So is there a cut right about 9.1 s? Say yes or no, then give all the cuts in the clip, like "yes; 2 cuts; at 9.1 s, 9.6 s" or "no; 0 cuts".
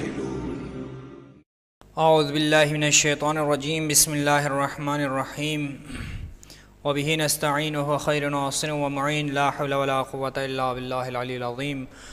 no; 1 cut; at 1.7 s